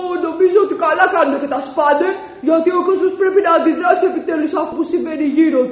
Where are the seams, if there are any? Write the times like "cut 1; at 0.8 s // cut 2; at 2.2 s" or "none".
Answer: cut 1; at 4.7 s